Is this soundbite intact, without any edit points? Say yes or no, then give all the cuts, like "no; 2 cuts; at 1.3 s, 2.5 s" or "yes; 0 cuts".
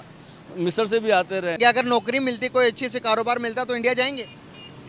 no; 1 cut; at 1.6 s